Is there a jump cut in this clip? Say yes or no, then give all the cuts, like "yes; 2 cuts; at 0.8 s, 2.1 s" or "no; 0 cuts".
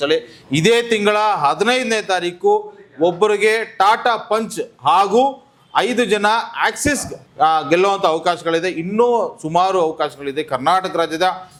no; 0 cuts